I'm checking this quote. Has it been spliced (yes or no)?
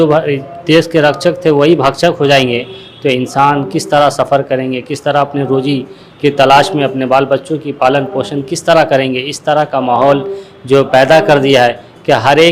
no